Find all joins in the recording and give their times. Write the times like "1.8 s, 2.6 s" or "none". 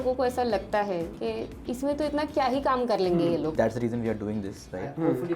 3.5 s